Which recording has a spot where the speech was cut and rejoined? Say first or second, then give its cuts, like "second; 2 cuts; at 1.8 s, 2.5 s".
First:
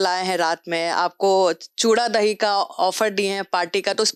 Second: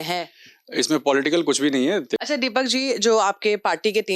second; 1 cut; at 2.2 s